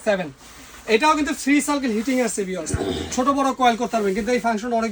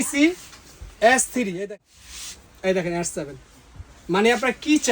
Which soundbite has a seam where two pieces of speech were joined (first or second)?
second